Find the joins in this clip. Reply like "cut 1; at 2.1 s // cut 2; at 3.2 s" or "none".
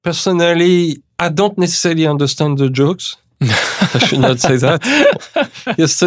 cut 1; at 1.1 s